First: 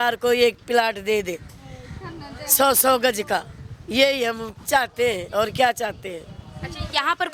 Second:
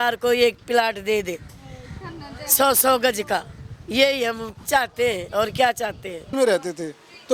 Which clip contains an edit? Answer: second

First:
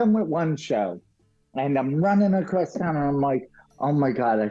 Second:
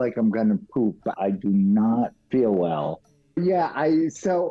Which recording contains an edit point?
second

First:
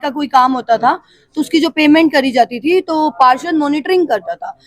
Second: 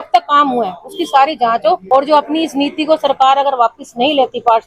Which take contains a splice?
second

